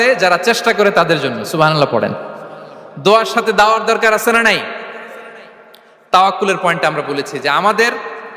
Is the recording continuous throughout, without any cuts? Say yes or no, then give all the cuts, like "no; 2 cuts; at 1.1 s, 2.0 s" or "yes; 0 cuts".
yes; 0 cuts